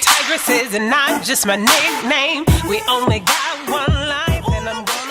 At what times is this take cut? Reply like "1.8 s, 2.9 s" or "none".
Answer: none